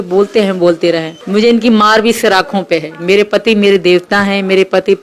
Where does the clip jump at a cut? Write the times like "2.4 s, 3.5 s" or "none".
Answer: 1.1 s